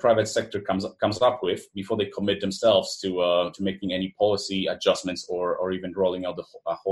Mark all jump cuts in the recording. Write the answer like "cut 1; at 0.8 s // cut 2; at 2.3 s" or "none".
none